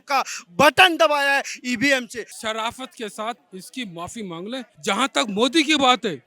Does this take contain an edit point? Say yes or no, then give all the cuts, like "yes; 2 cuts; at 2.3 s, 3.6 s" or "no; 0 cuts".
yes; 3 cuts; at 2.4 s, 3.5 s, 4.7 s